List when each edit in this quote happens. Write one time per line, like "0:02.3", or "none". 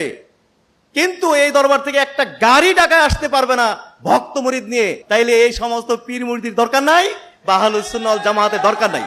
0:05.0